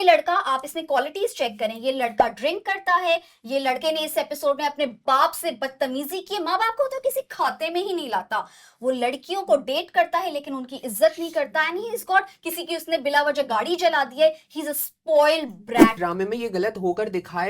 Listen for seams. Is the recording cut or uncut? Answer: cut